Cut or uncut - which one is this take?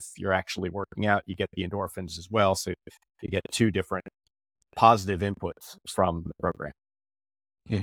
cut